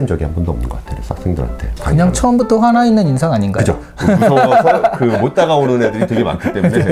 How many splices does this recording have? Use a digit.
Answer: 0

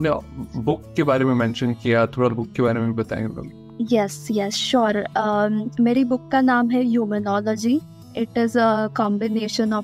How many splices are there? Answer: 0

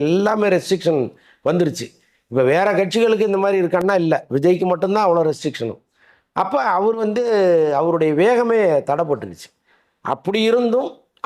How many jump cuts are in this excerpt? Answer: 0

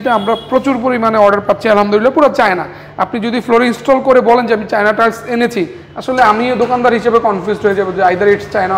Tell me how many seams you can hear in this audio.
0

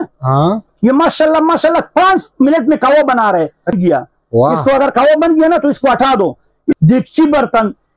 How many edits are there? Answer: 2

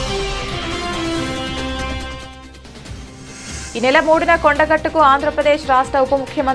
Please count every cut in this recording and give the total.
1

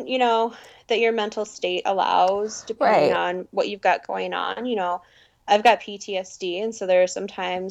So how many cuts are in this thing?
0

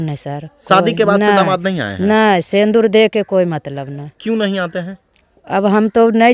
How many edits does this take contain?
0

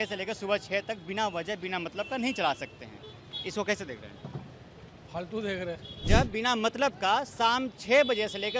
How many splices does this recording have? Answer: 1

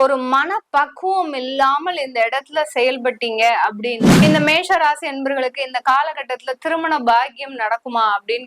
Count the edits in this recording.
1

